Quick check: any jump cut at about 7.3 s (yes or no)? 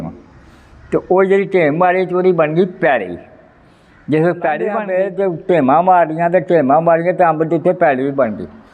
no